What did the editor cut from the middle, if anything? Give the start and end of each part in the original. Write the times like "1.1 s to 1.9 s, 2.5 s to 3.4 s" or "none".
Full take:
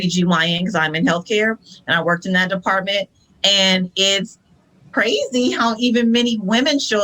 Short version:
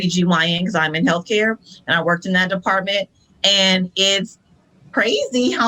none